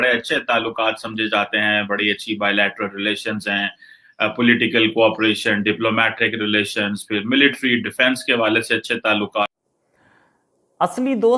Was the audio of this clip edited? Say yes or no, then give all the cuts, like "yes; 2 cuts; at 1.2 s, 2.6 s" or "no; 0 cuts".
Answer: yes; 1 cut; at 9.5 s